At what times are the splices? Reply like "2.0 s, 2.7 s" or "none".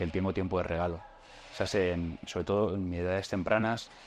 none